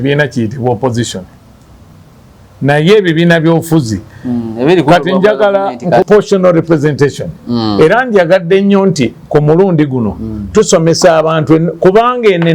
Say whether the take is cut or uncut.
cut